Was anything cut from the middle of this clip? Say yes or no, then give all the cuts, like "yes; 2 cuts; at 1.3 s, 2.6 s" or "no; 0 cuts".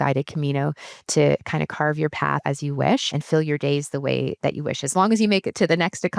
yes; 2 cuts; at 2.4 s, 3.1 s